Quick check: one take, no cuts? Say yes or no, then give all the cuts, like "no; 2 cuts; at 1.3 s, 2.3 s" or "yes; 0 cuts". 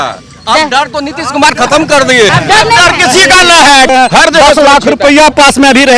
no; 2 cuts; at 2.3 s, 3.9 s